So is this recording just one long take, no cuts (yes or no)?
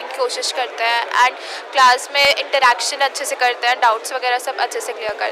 yes